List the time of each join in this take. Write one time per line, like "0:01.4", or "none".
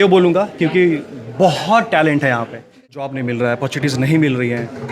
0:03.1